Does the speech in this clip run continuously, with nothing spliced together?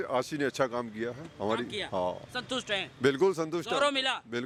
yes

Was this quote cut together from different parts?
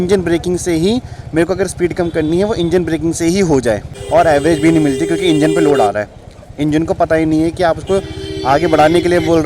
yes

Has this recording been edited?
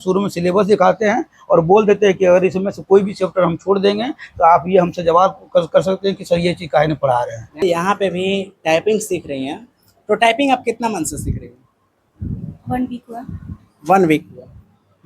yes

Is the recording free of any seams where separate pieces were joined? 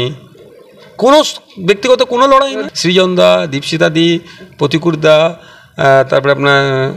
no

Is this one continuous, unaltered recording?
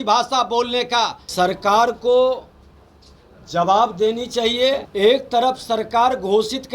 no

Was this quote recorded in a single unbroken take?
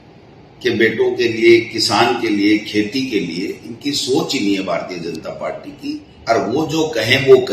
no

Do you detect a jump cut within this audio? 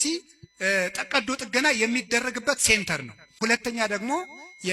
yes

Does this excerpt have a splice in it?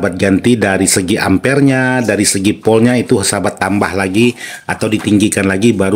no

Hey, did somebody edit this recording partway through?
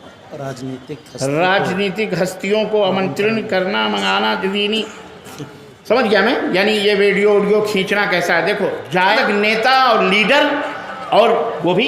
yes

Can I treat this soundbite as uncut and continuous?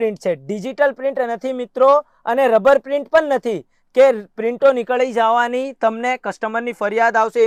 yes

